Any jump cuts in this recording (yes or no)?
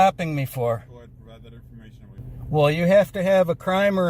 yes